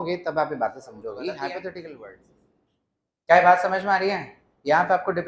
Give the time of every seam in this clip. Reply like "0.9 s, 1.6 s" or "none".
2.0 s